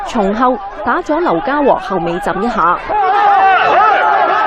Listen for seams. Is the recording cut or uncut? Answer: uncut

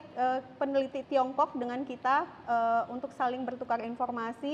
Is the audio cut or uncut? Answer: uncut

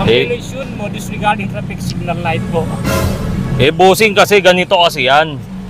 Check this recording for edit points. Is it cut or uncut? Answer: uncut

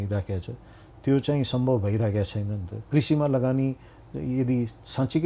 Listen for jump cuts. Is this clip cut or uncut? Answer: cut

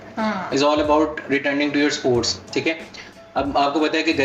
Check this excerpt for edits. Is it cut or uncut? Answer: cut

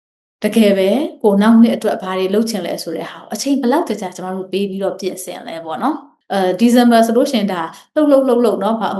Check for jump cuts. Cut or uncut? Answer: cut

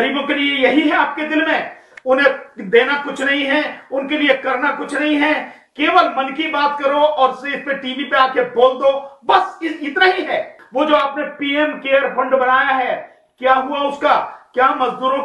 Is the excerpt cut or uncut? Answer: cut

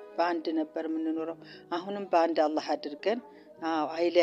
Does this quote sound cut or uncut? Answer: uncut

